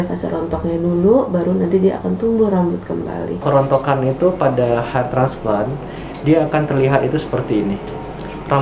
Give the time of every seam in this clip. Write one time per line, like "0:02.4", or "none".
0:03.3

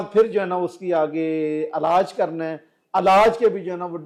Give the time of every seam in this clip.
none

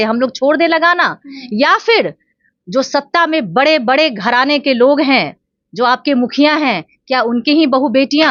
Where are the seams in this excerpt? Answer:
none

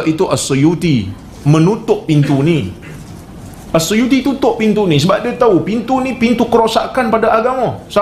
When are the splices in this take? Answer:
none

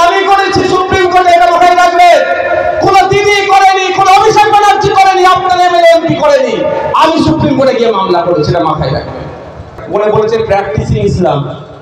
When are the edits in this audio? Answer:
0:09.8

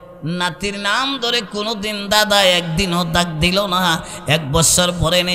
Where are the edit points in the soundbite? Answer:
none

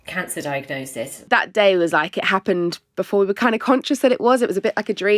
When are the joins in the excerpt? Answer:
0:01.2

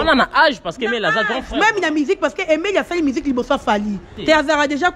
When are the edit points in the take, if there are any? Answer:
0:04.1

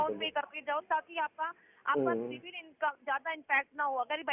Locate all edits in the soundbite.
none

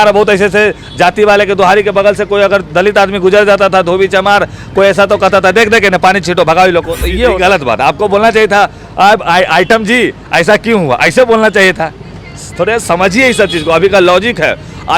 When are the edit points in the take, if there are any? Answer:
0:07.4

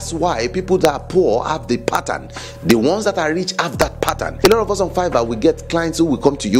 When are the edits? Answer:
0:04.3

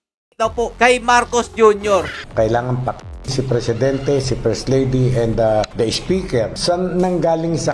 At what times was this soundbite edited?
0:02.2

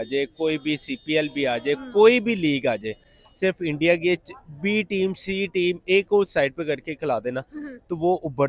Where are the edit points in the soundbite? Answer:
none

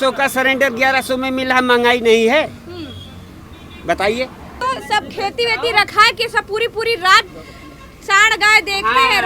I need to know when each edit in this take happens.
0:04.5

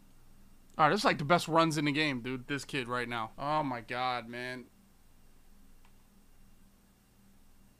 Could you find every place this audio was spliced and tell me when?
none

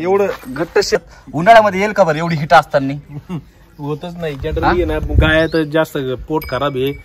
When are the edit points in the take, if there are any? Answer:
0:01.0

